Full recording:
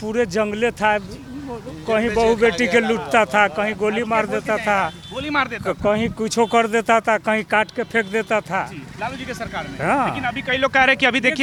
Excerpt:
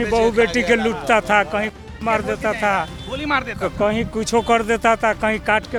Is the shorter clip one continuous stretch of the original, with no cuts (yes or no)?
yes